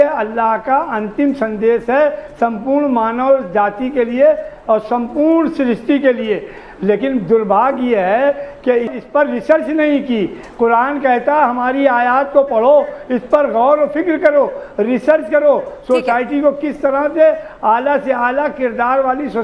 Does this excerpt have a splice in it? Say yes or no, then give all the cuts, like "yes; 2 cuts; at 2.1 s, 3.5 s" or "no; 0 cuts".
no; 0 cuts